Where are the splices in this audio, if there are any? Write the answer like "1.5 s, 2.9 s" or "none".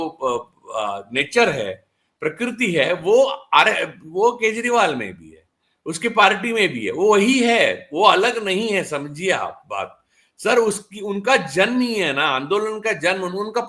none